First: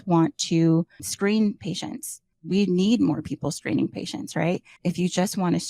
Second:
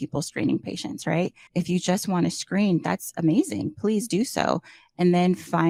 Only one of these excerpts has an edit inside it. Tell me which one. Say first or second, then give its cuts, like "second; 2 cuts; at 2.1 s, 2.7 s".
first; 1 cut; at 2.3 s